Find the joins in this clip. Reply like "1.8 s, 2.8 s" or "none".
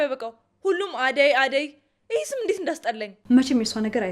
3.1 s